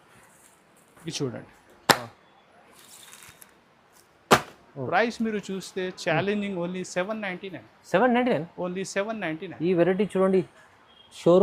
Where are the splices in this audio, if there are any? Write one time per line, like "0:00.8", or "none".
none